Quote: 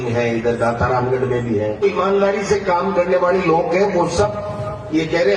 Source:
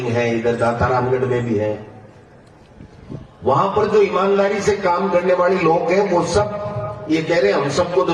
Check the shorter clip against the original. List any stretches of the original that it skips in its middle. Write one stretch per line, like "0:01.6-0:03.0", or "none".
0:01.8-0:04.0